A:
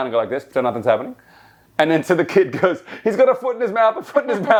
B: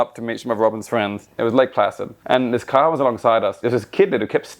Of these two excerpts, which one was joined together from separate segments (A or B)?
B